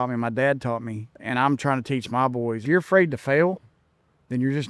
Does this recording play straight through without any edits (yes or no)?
no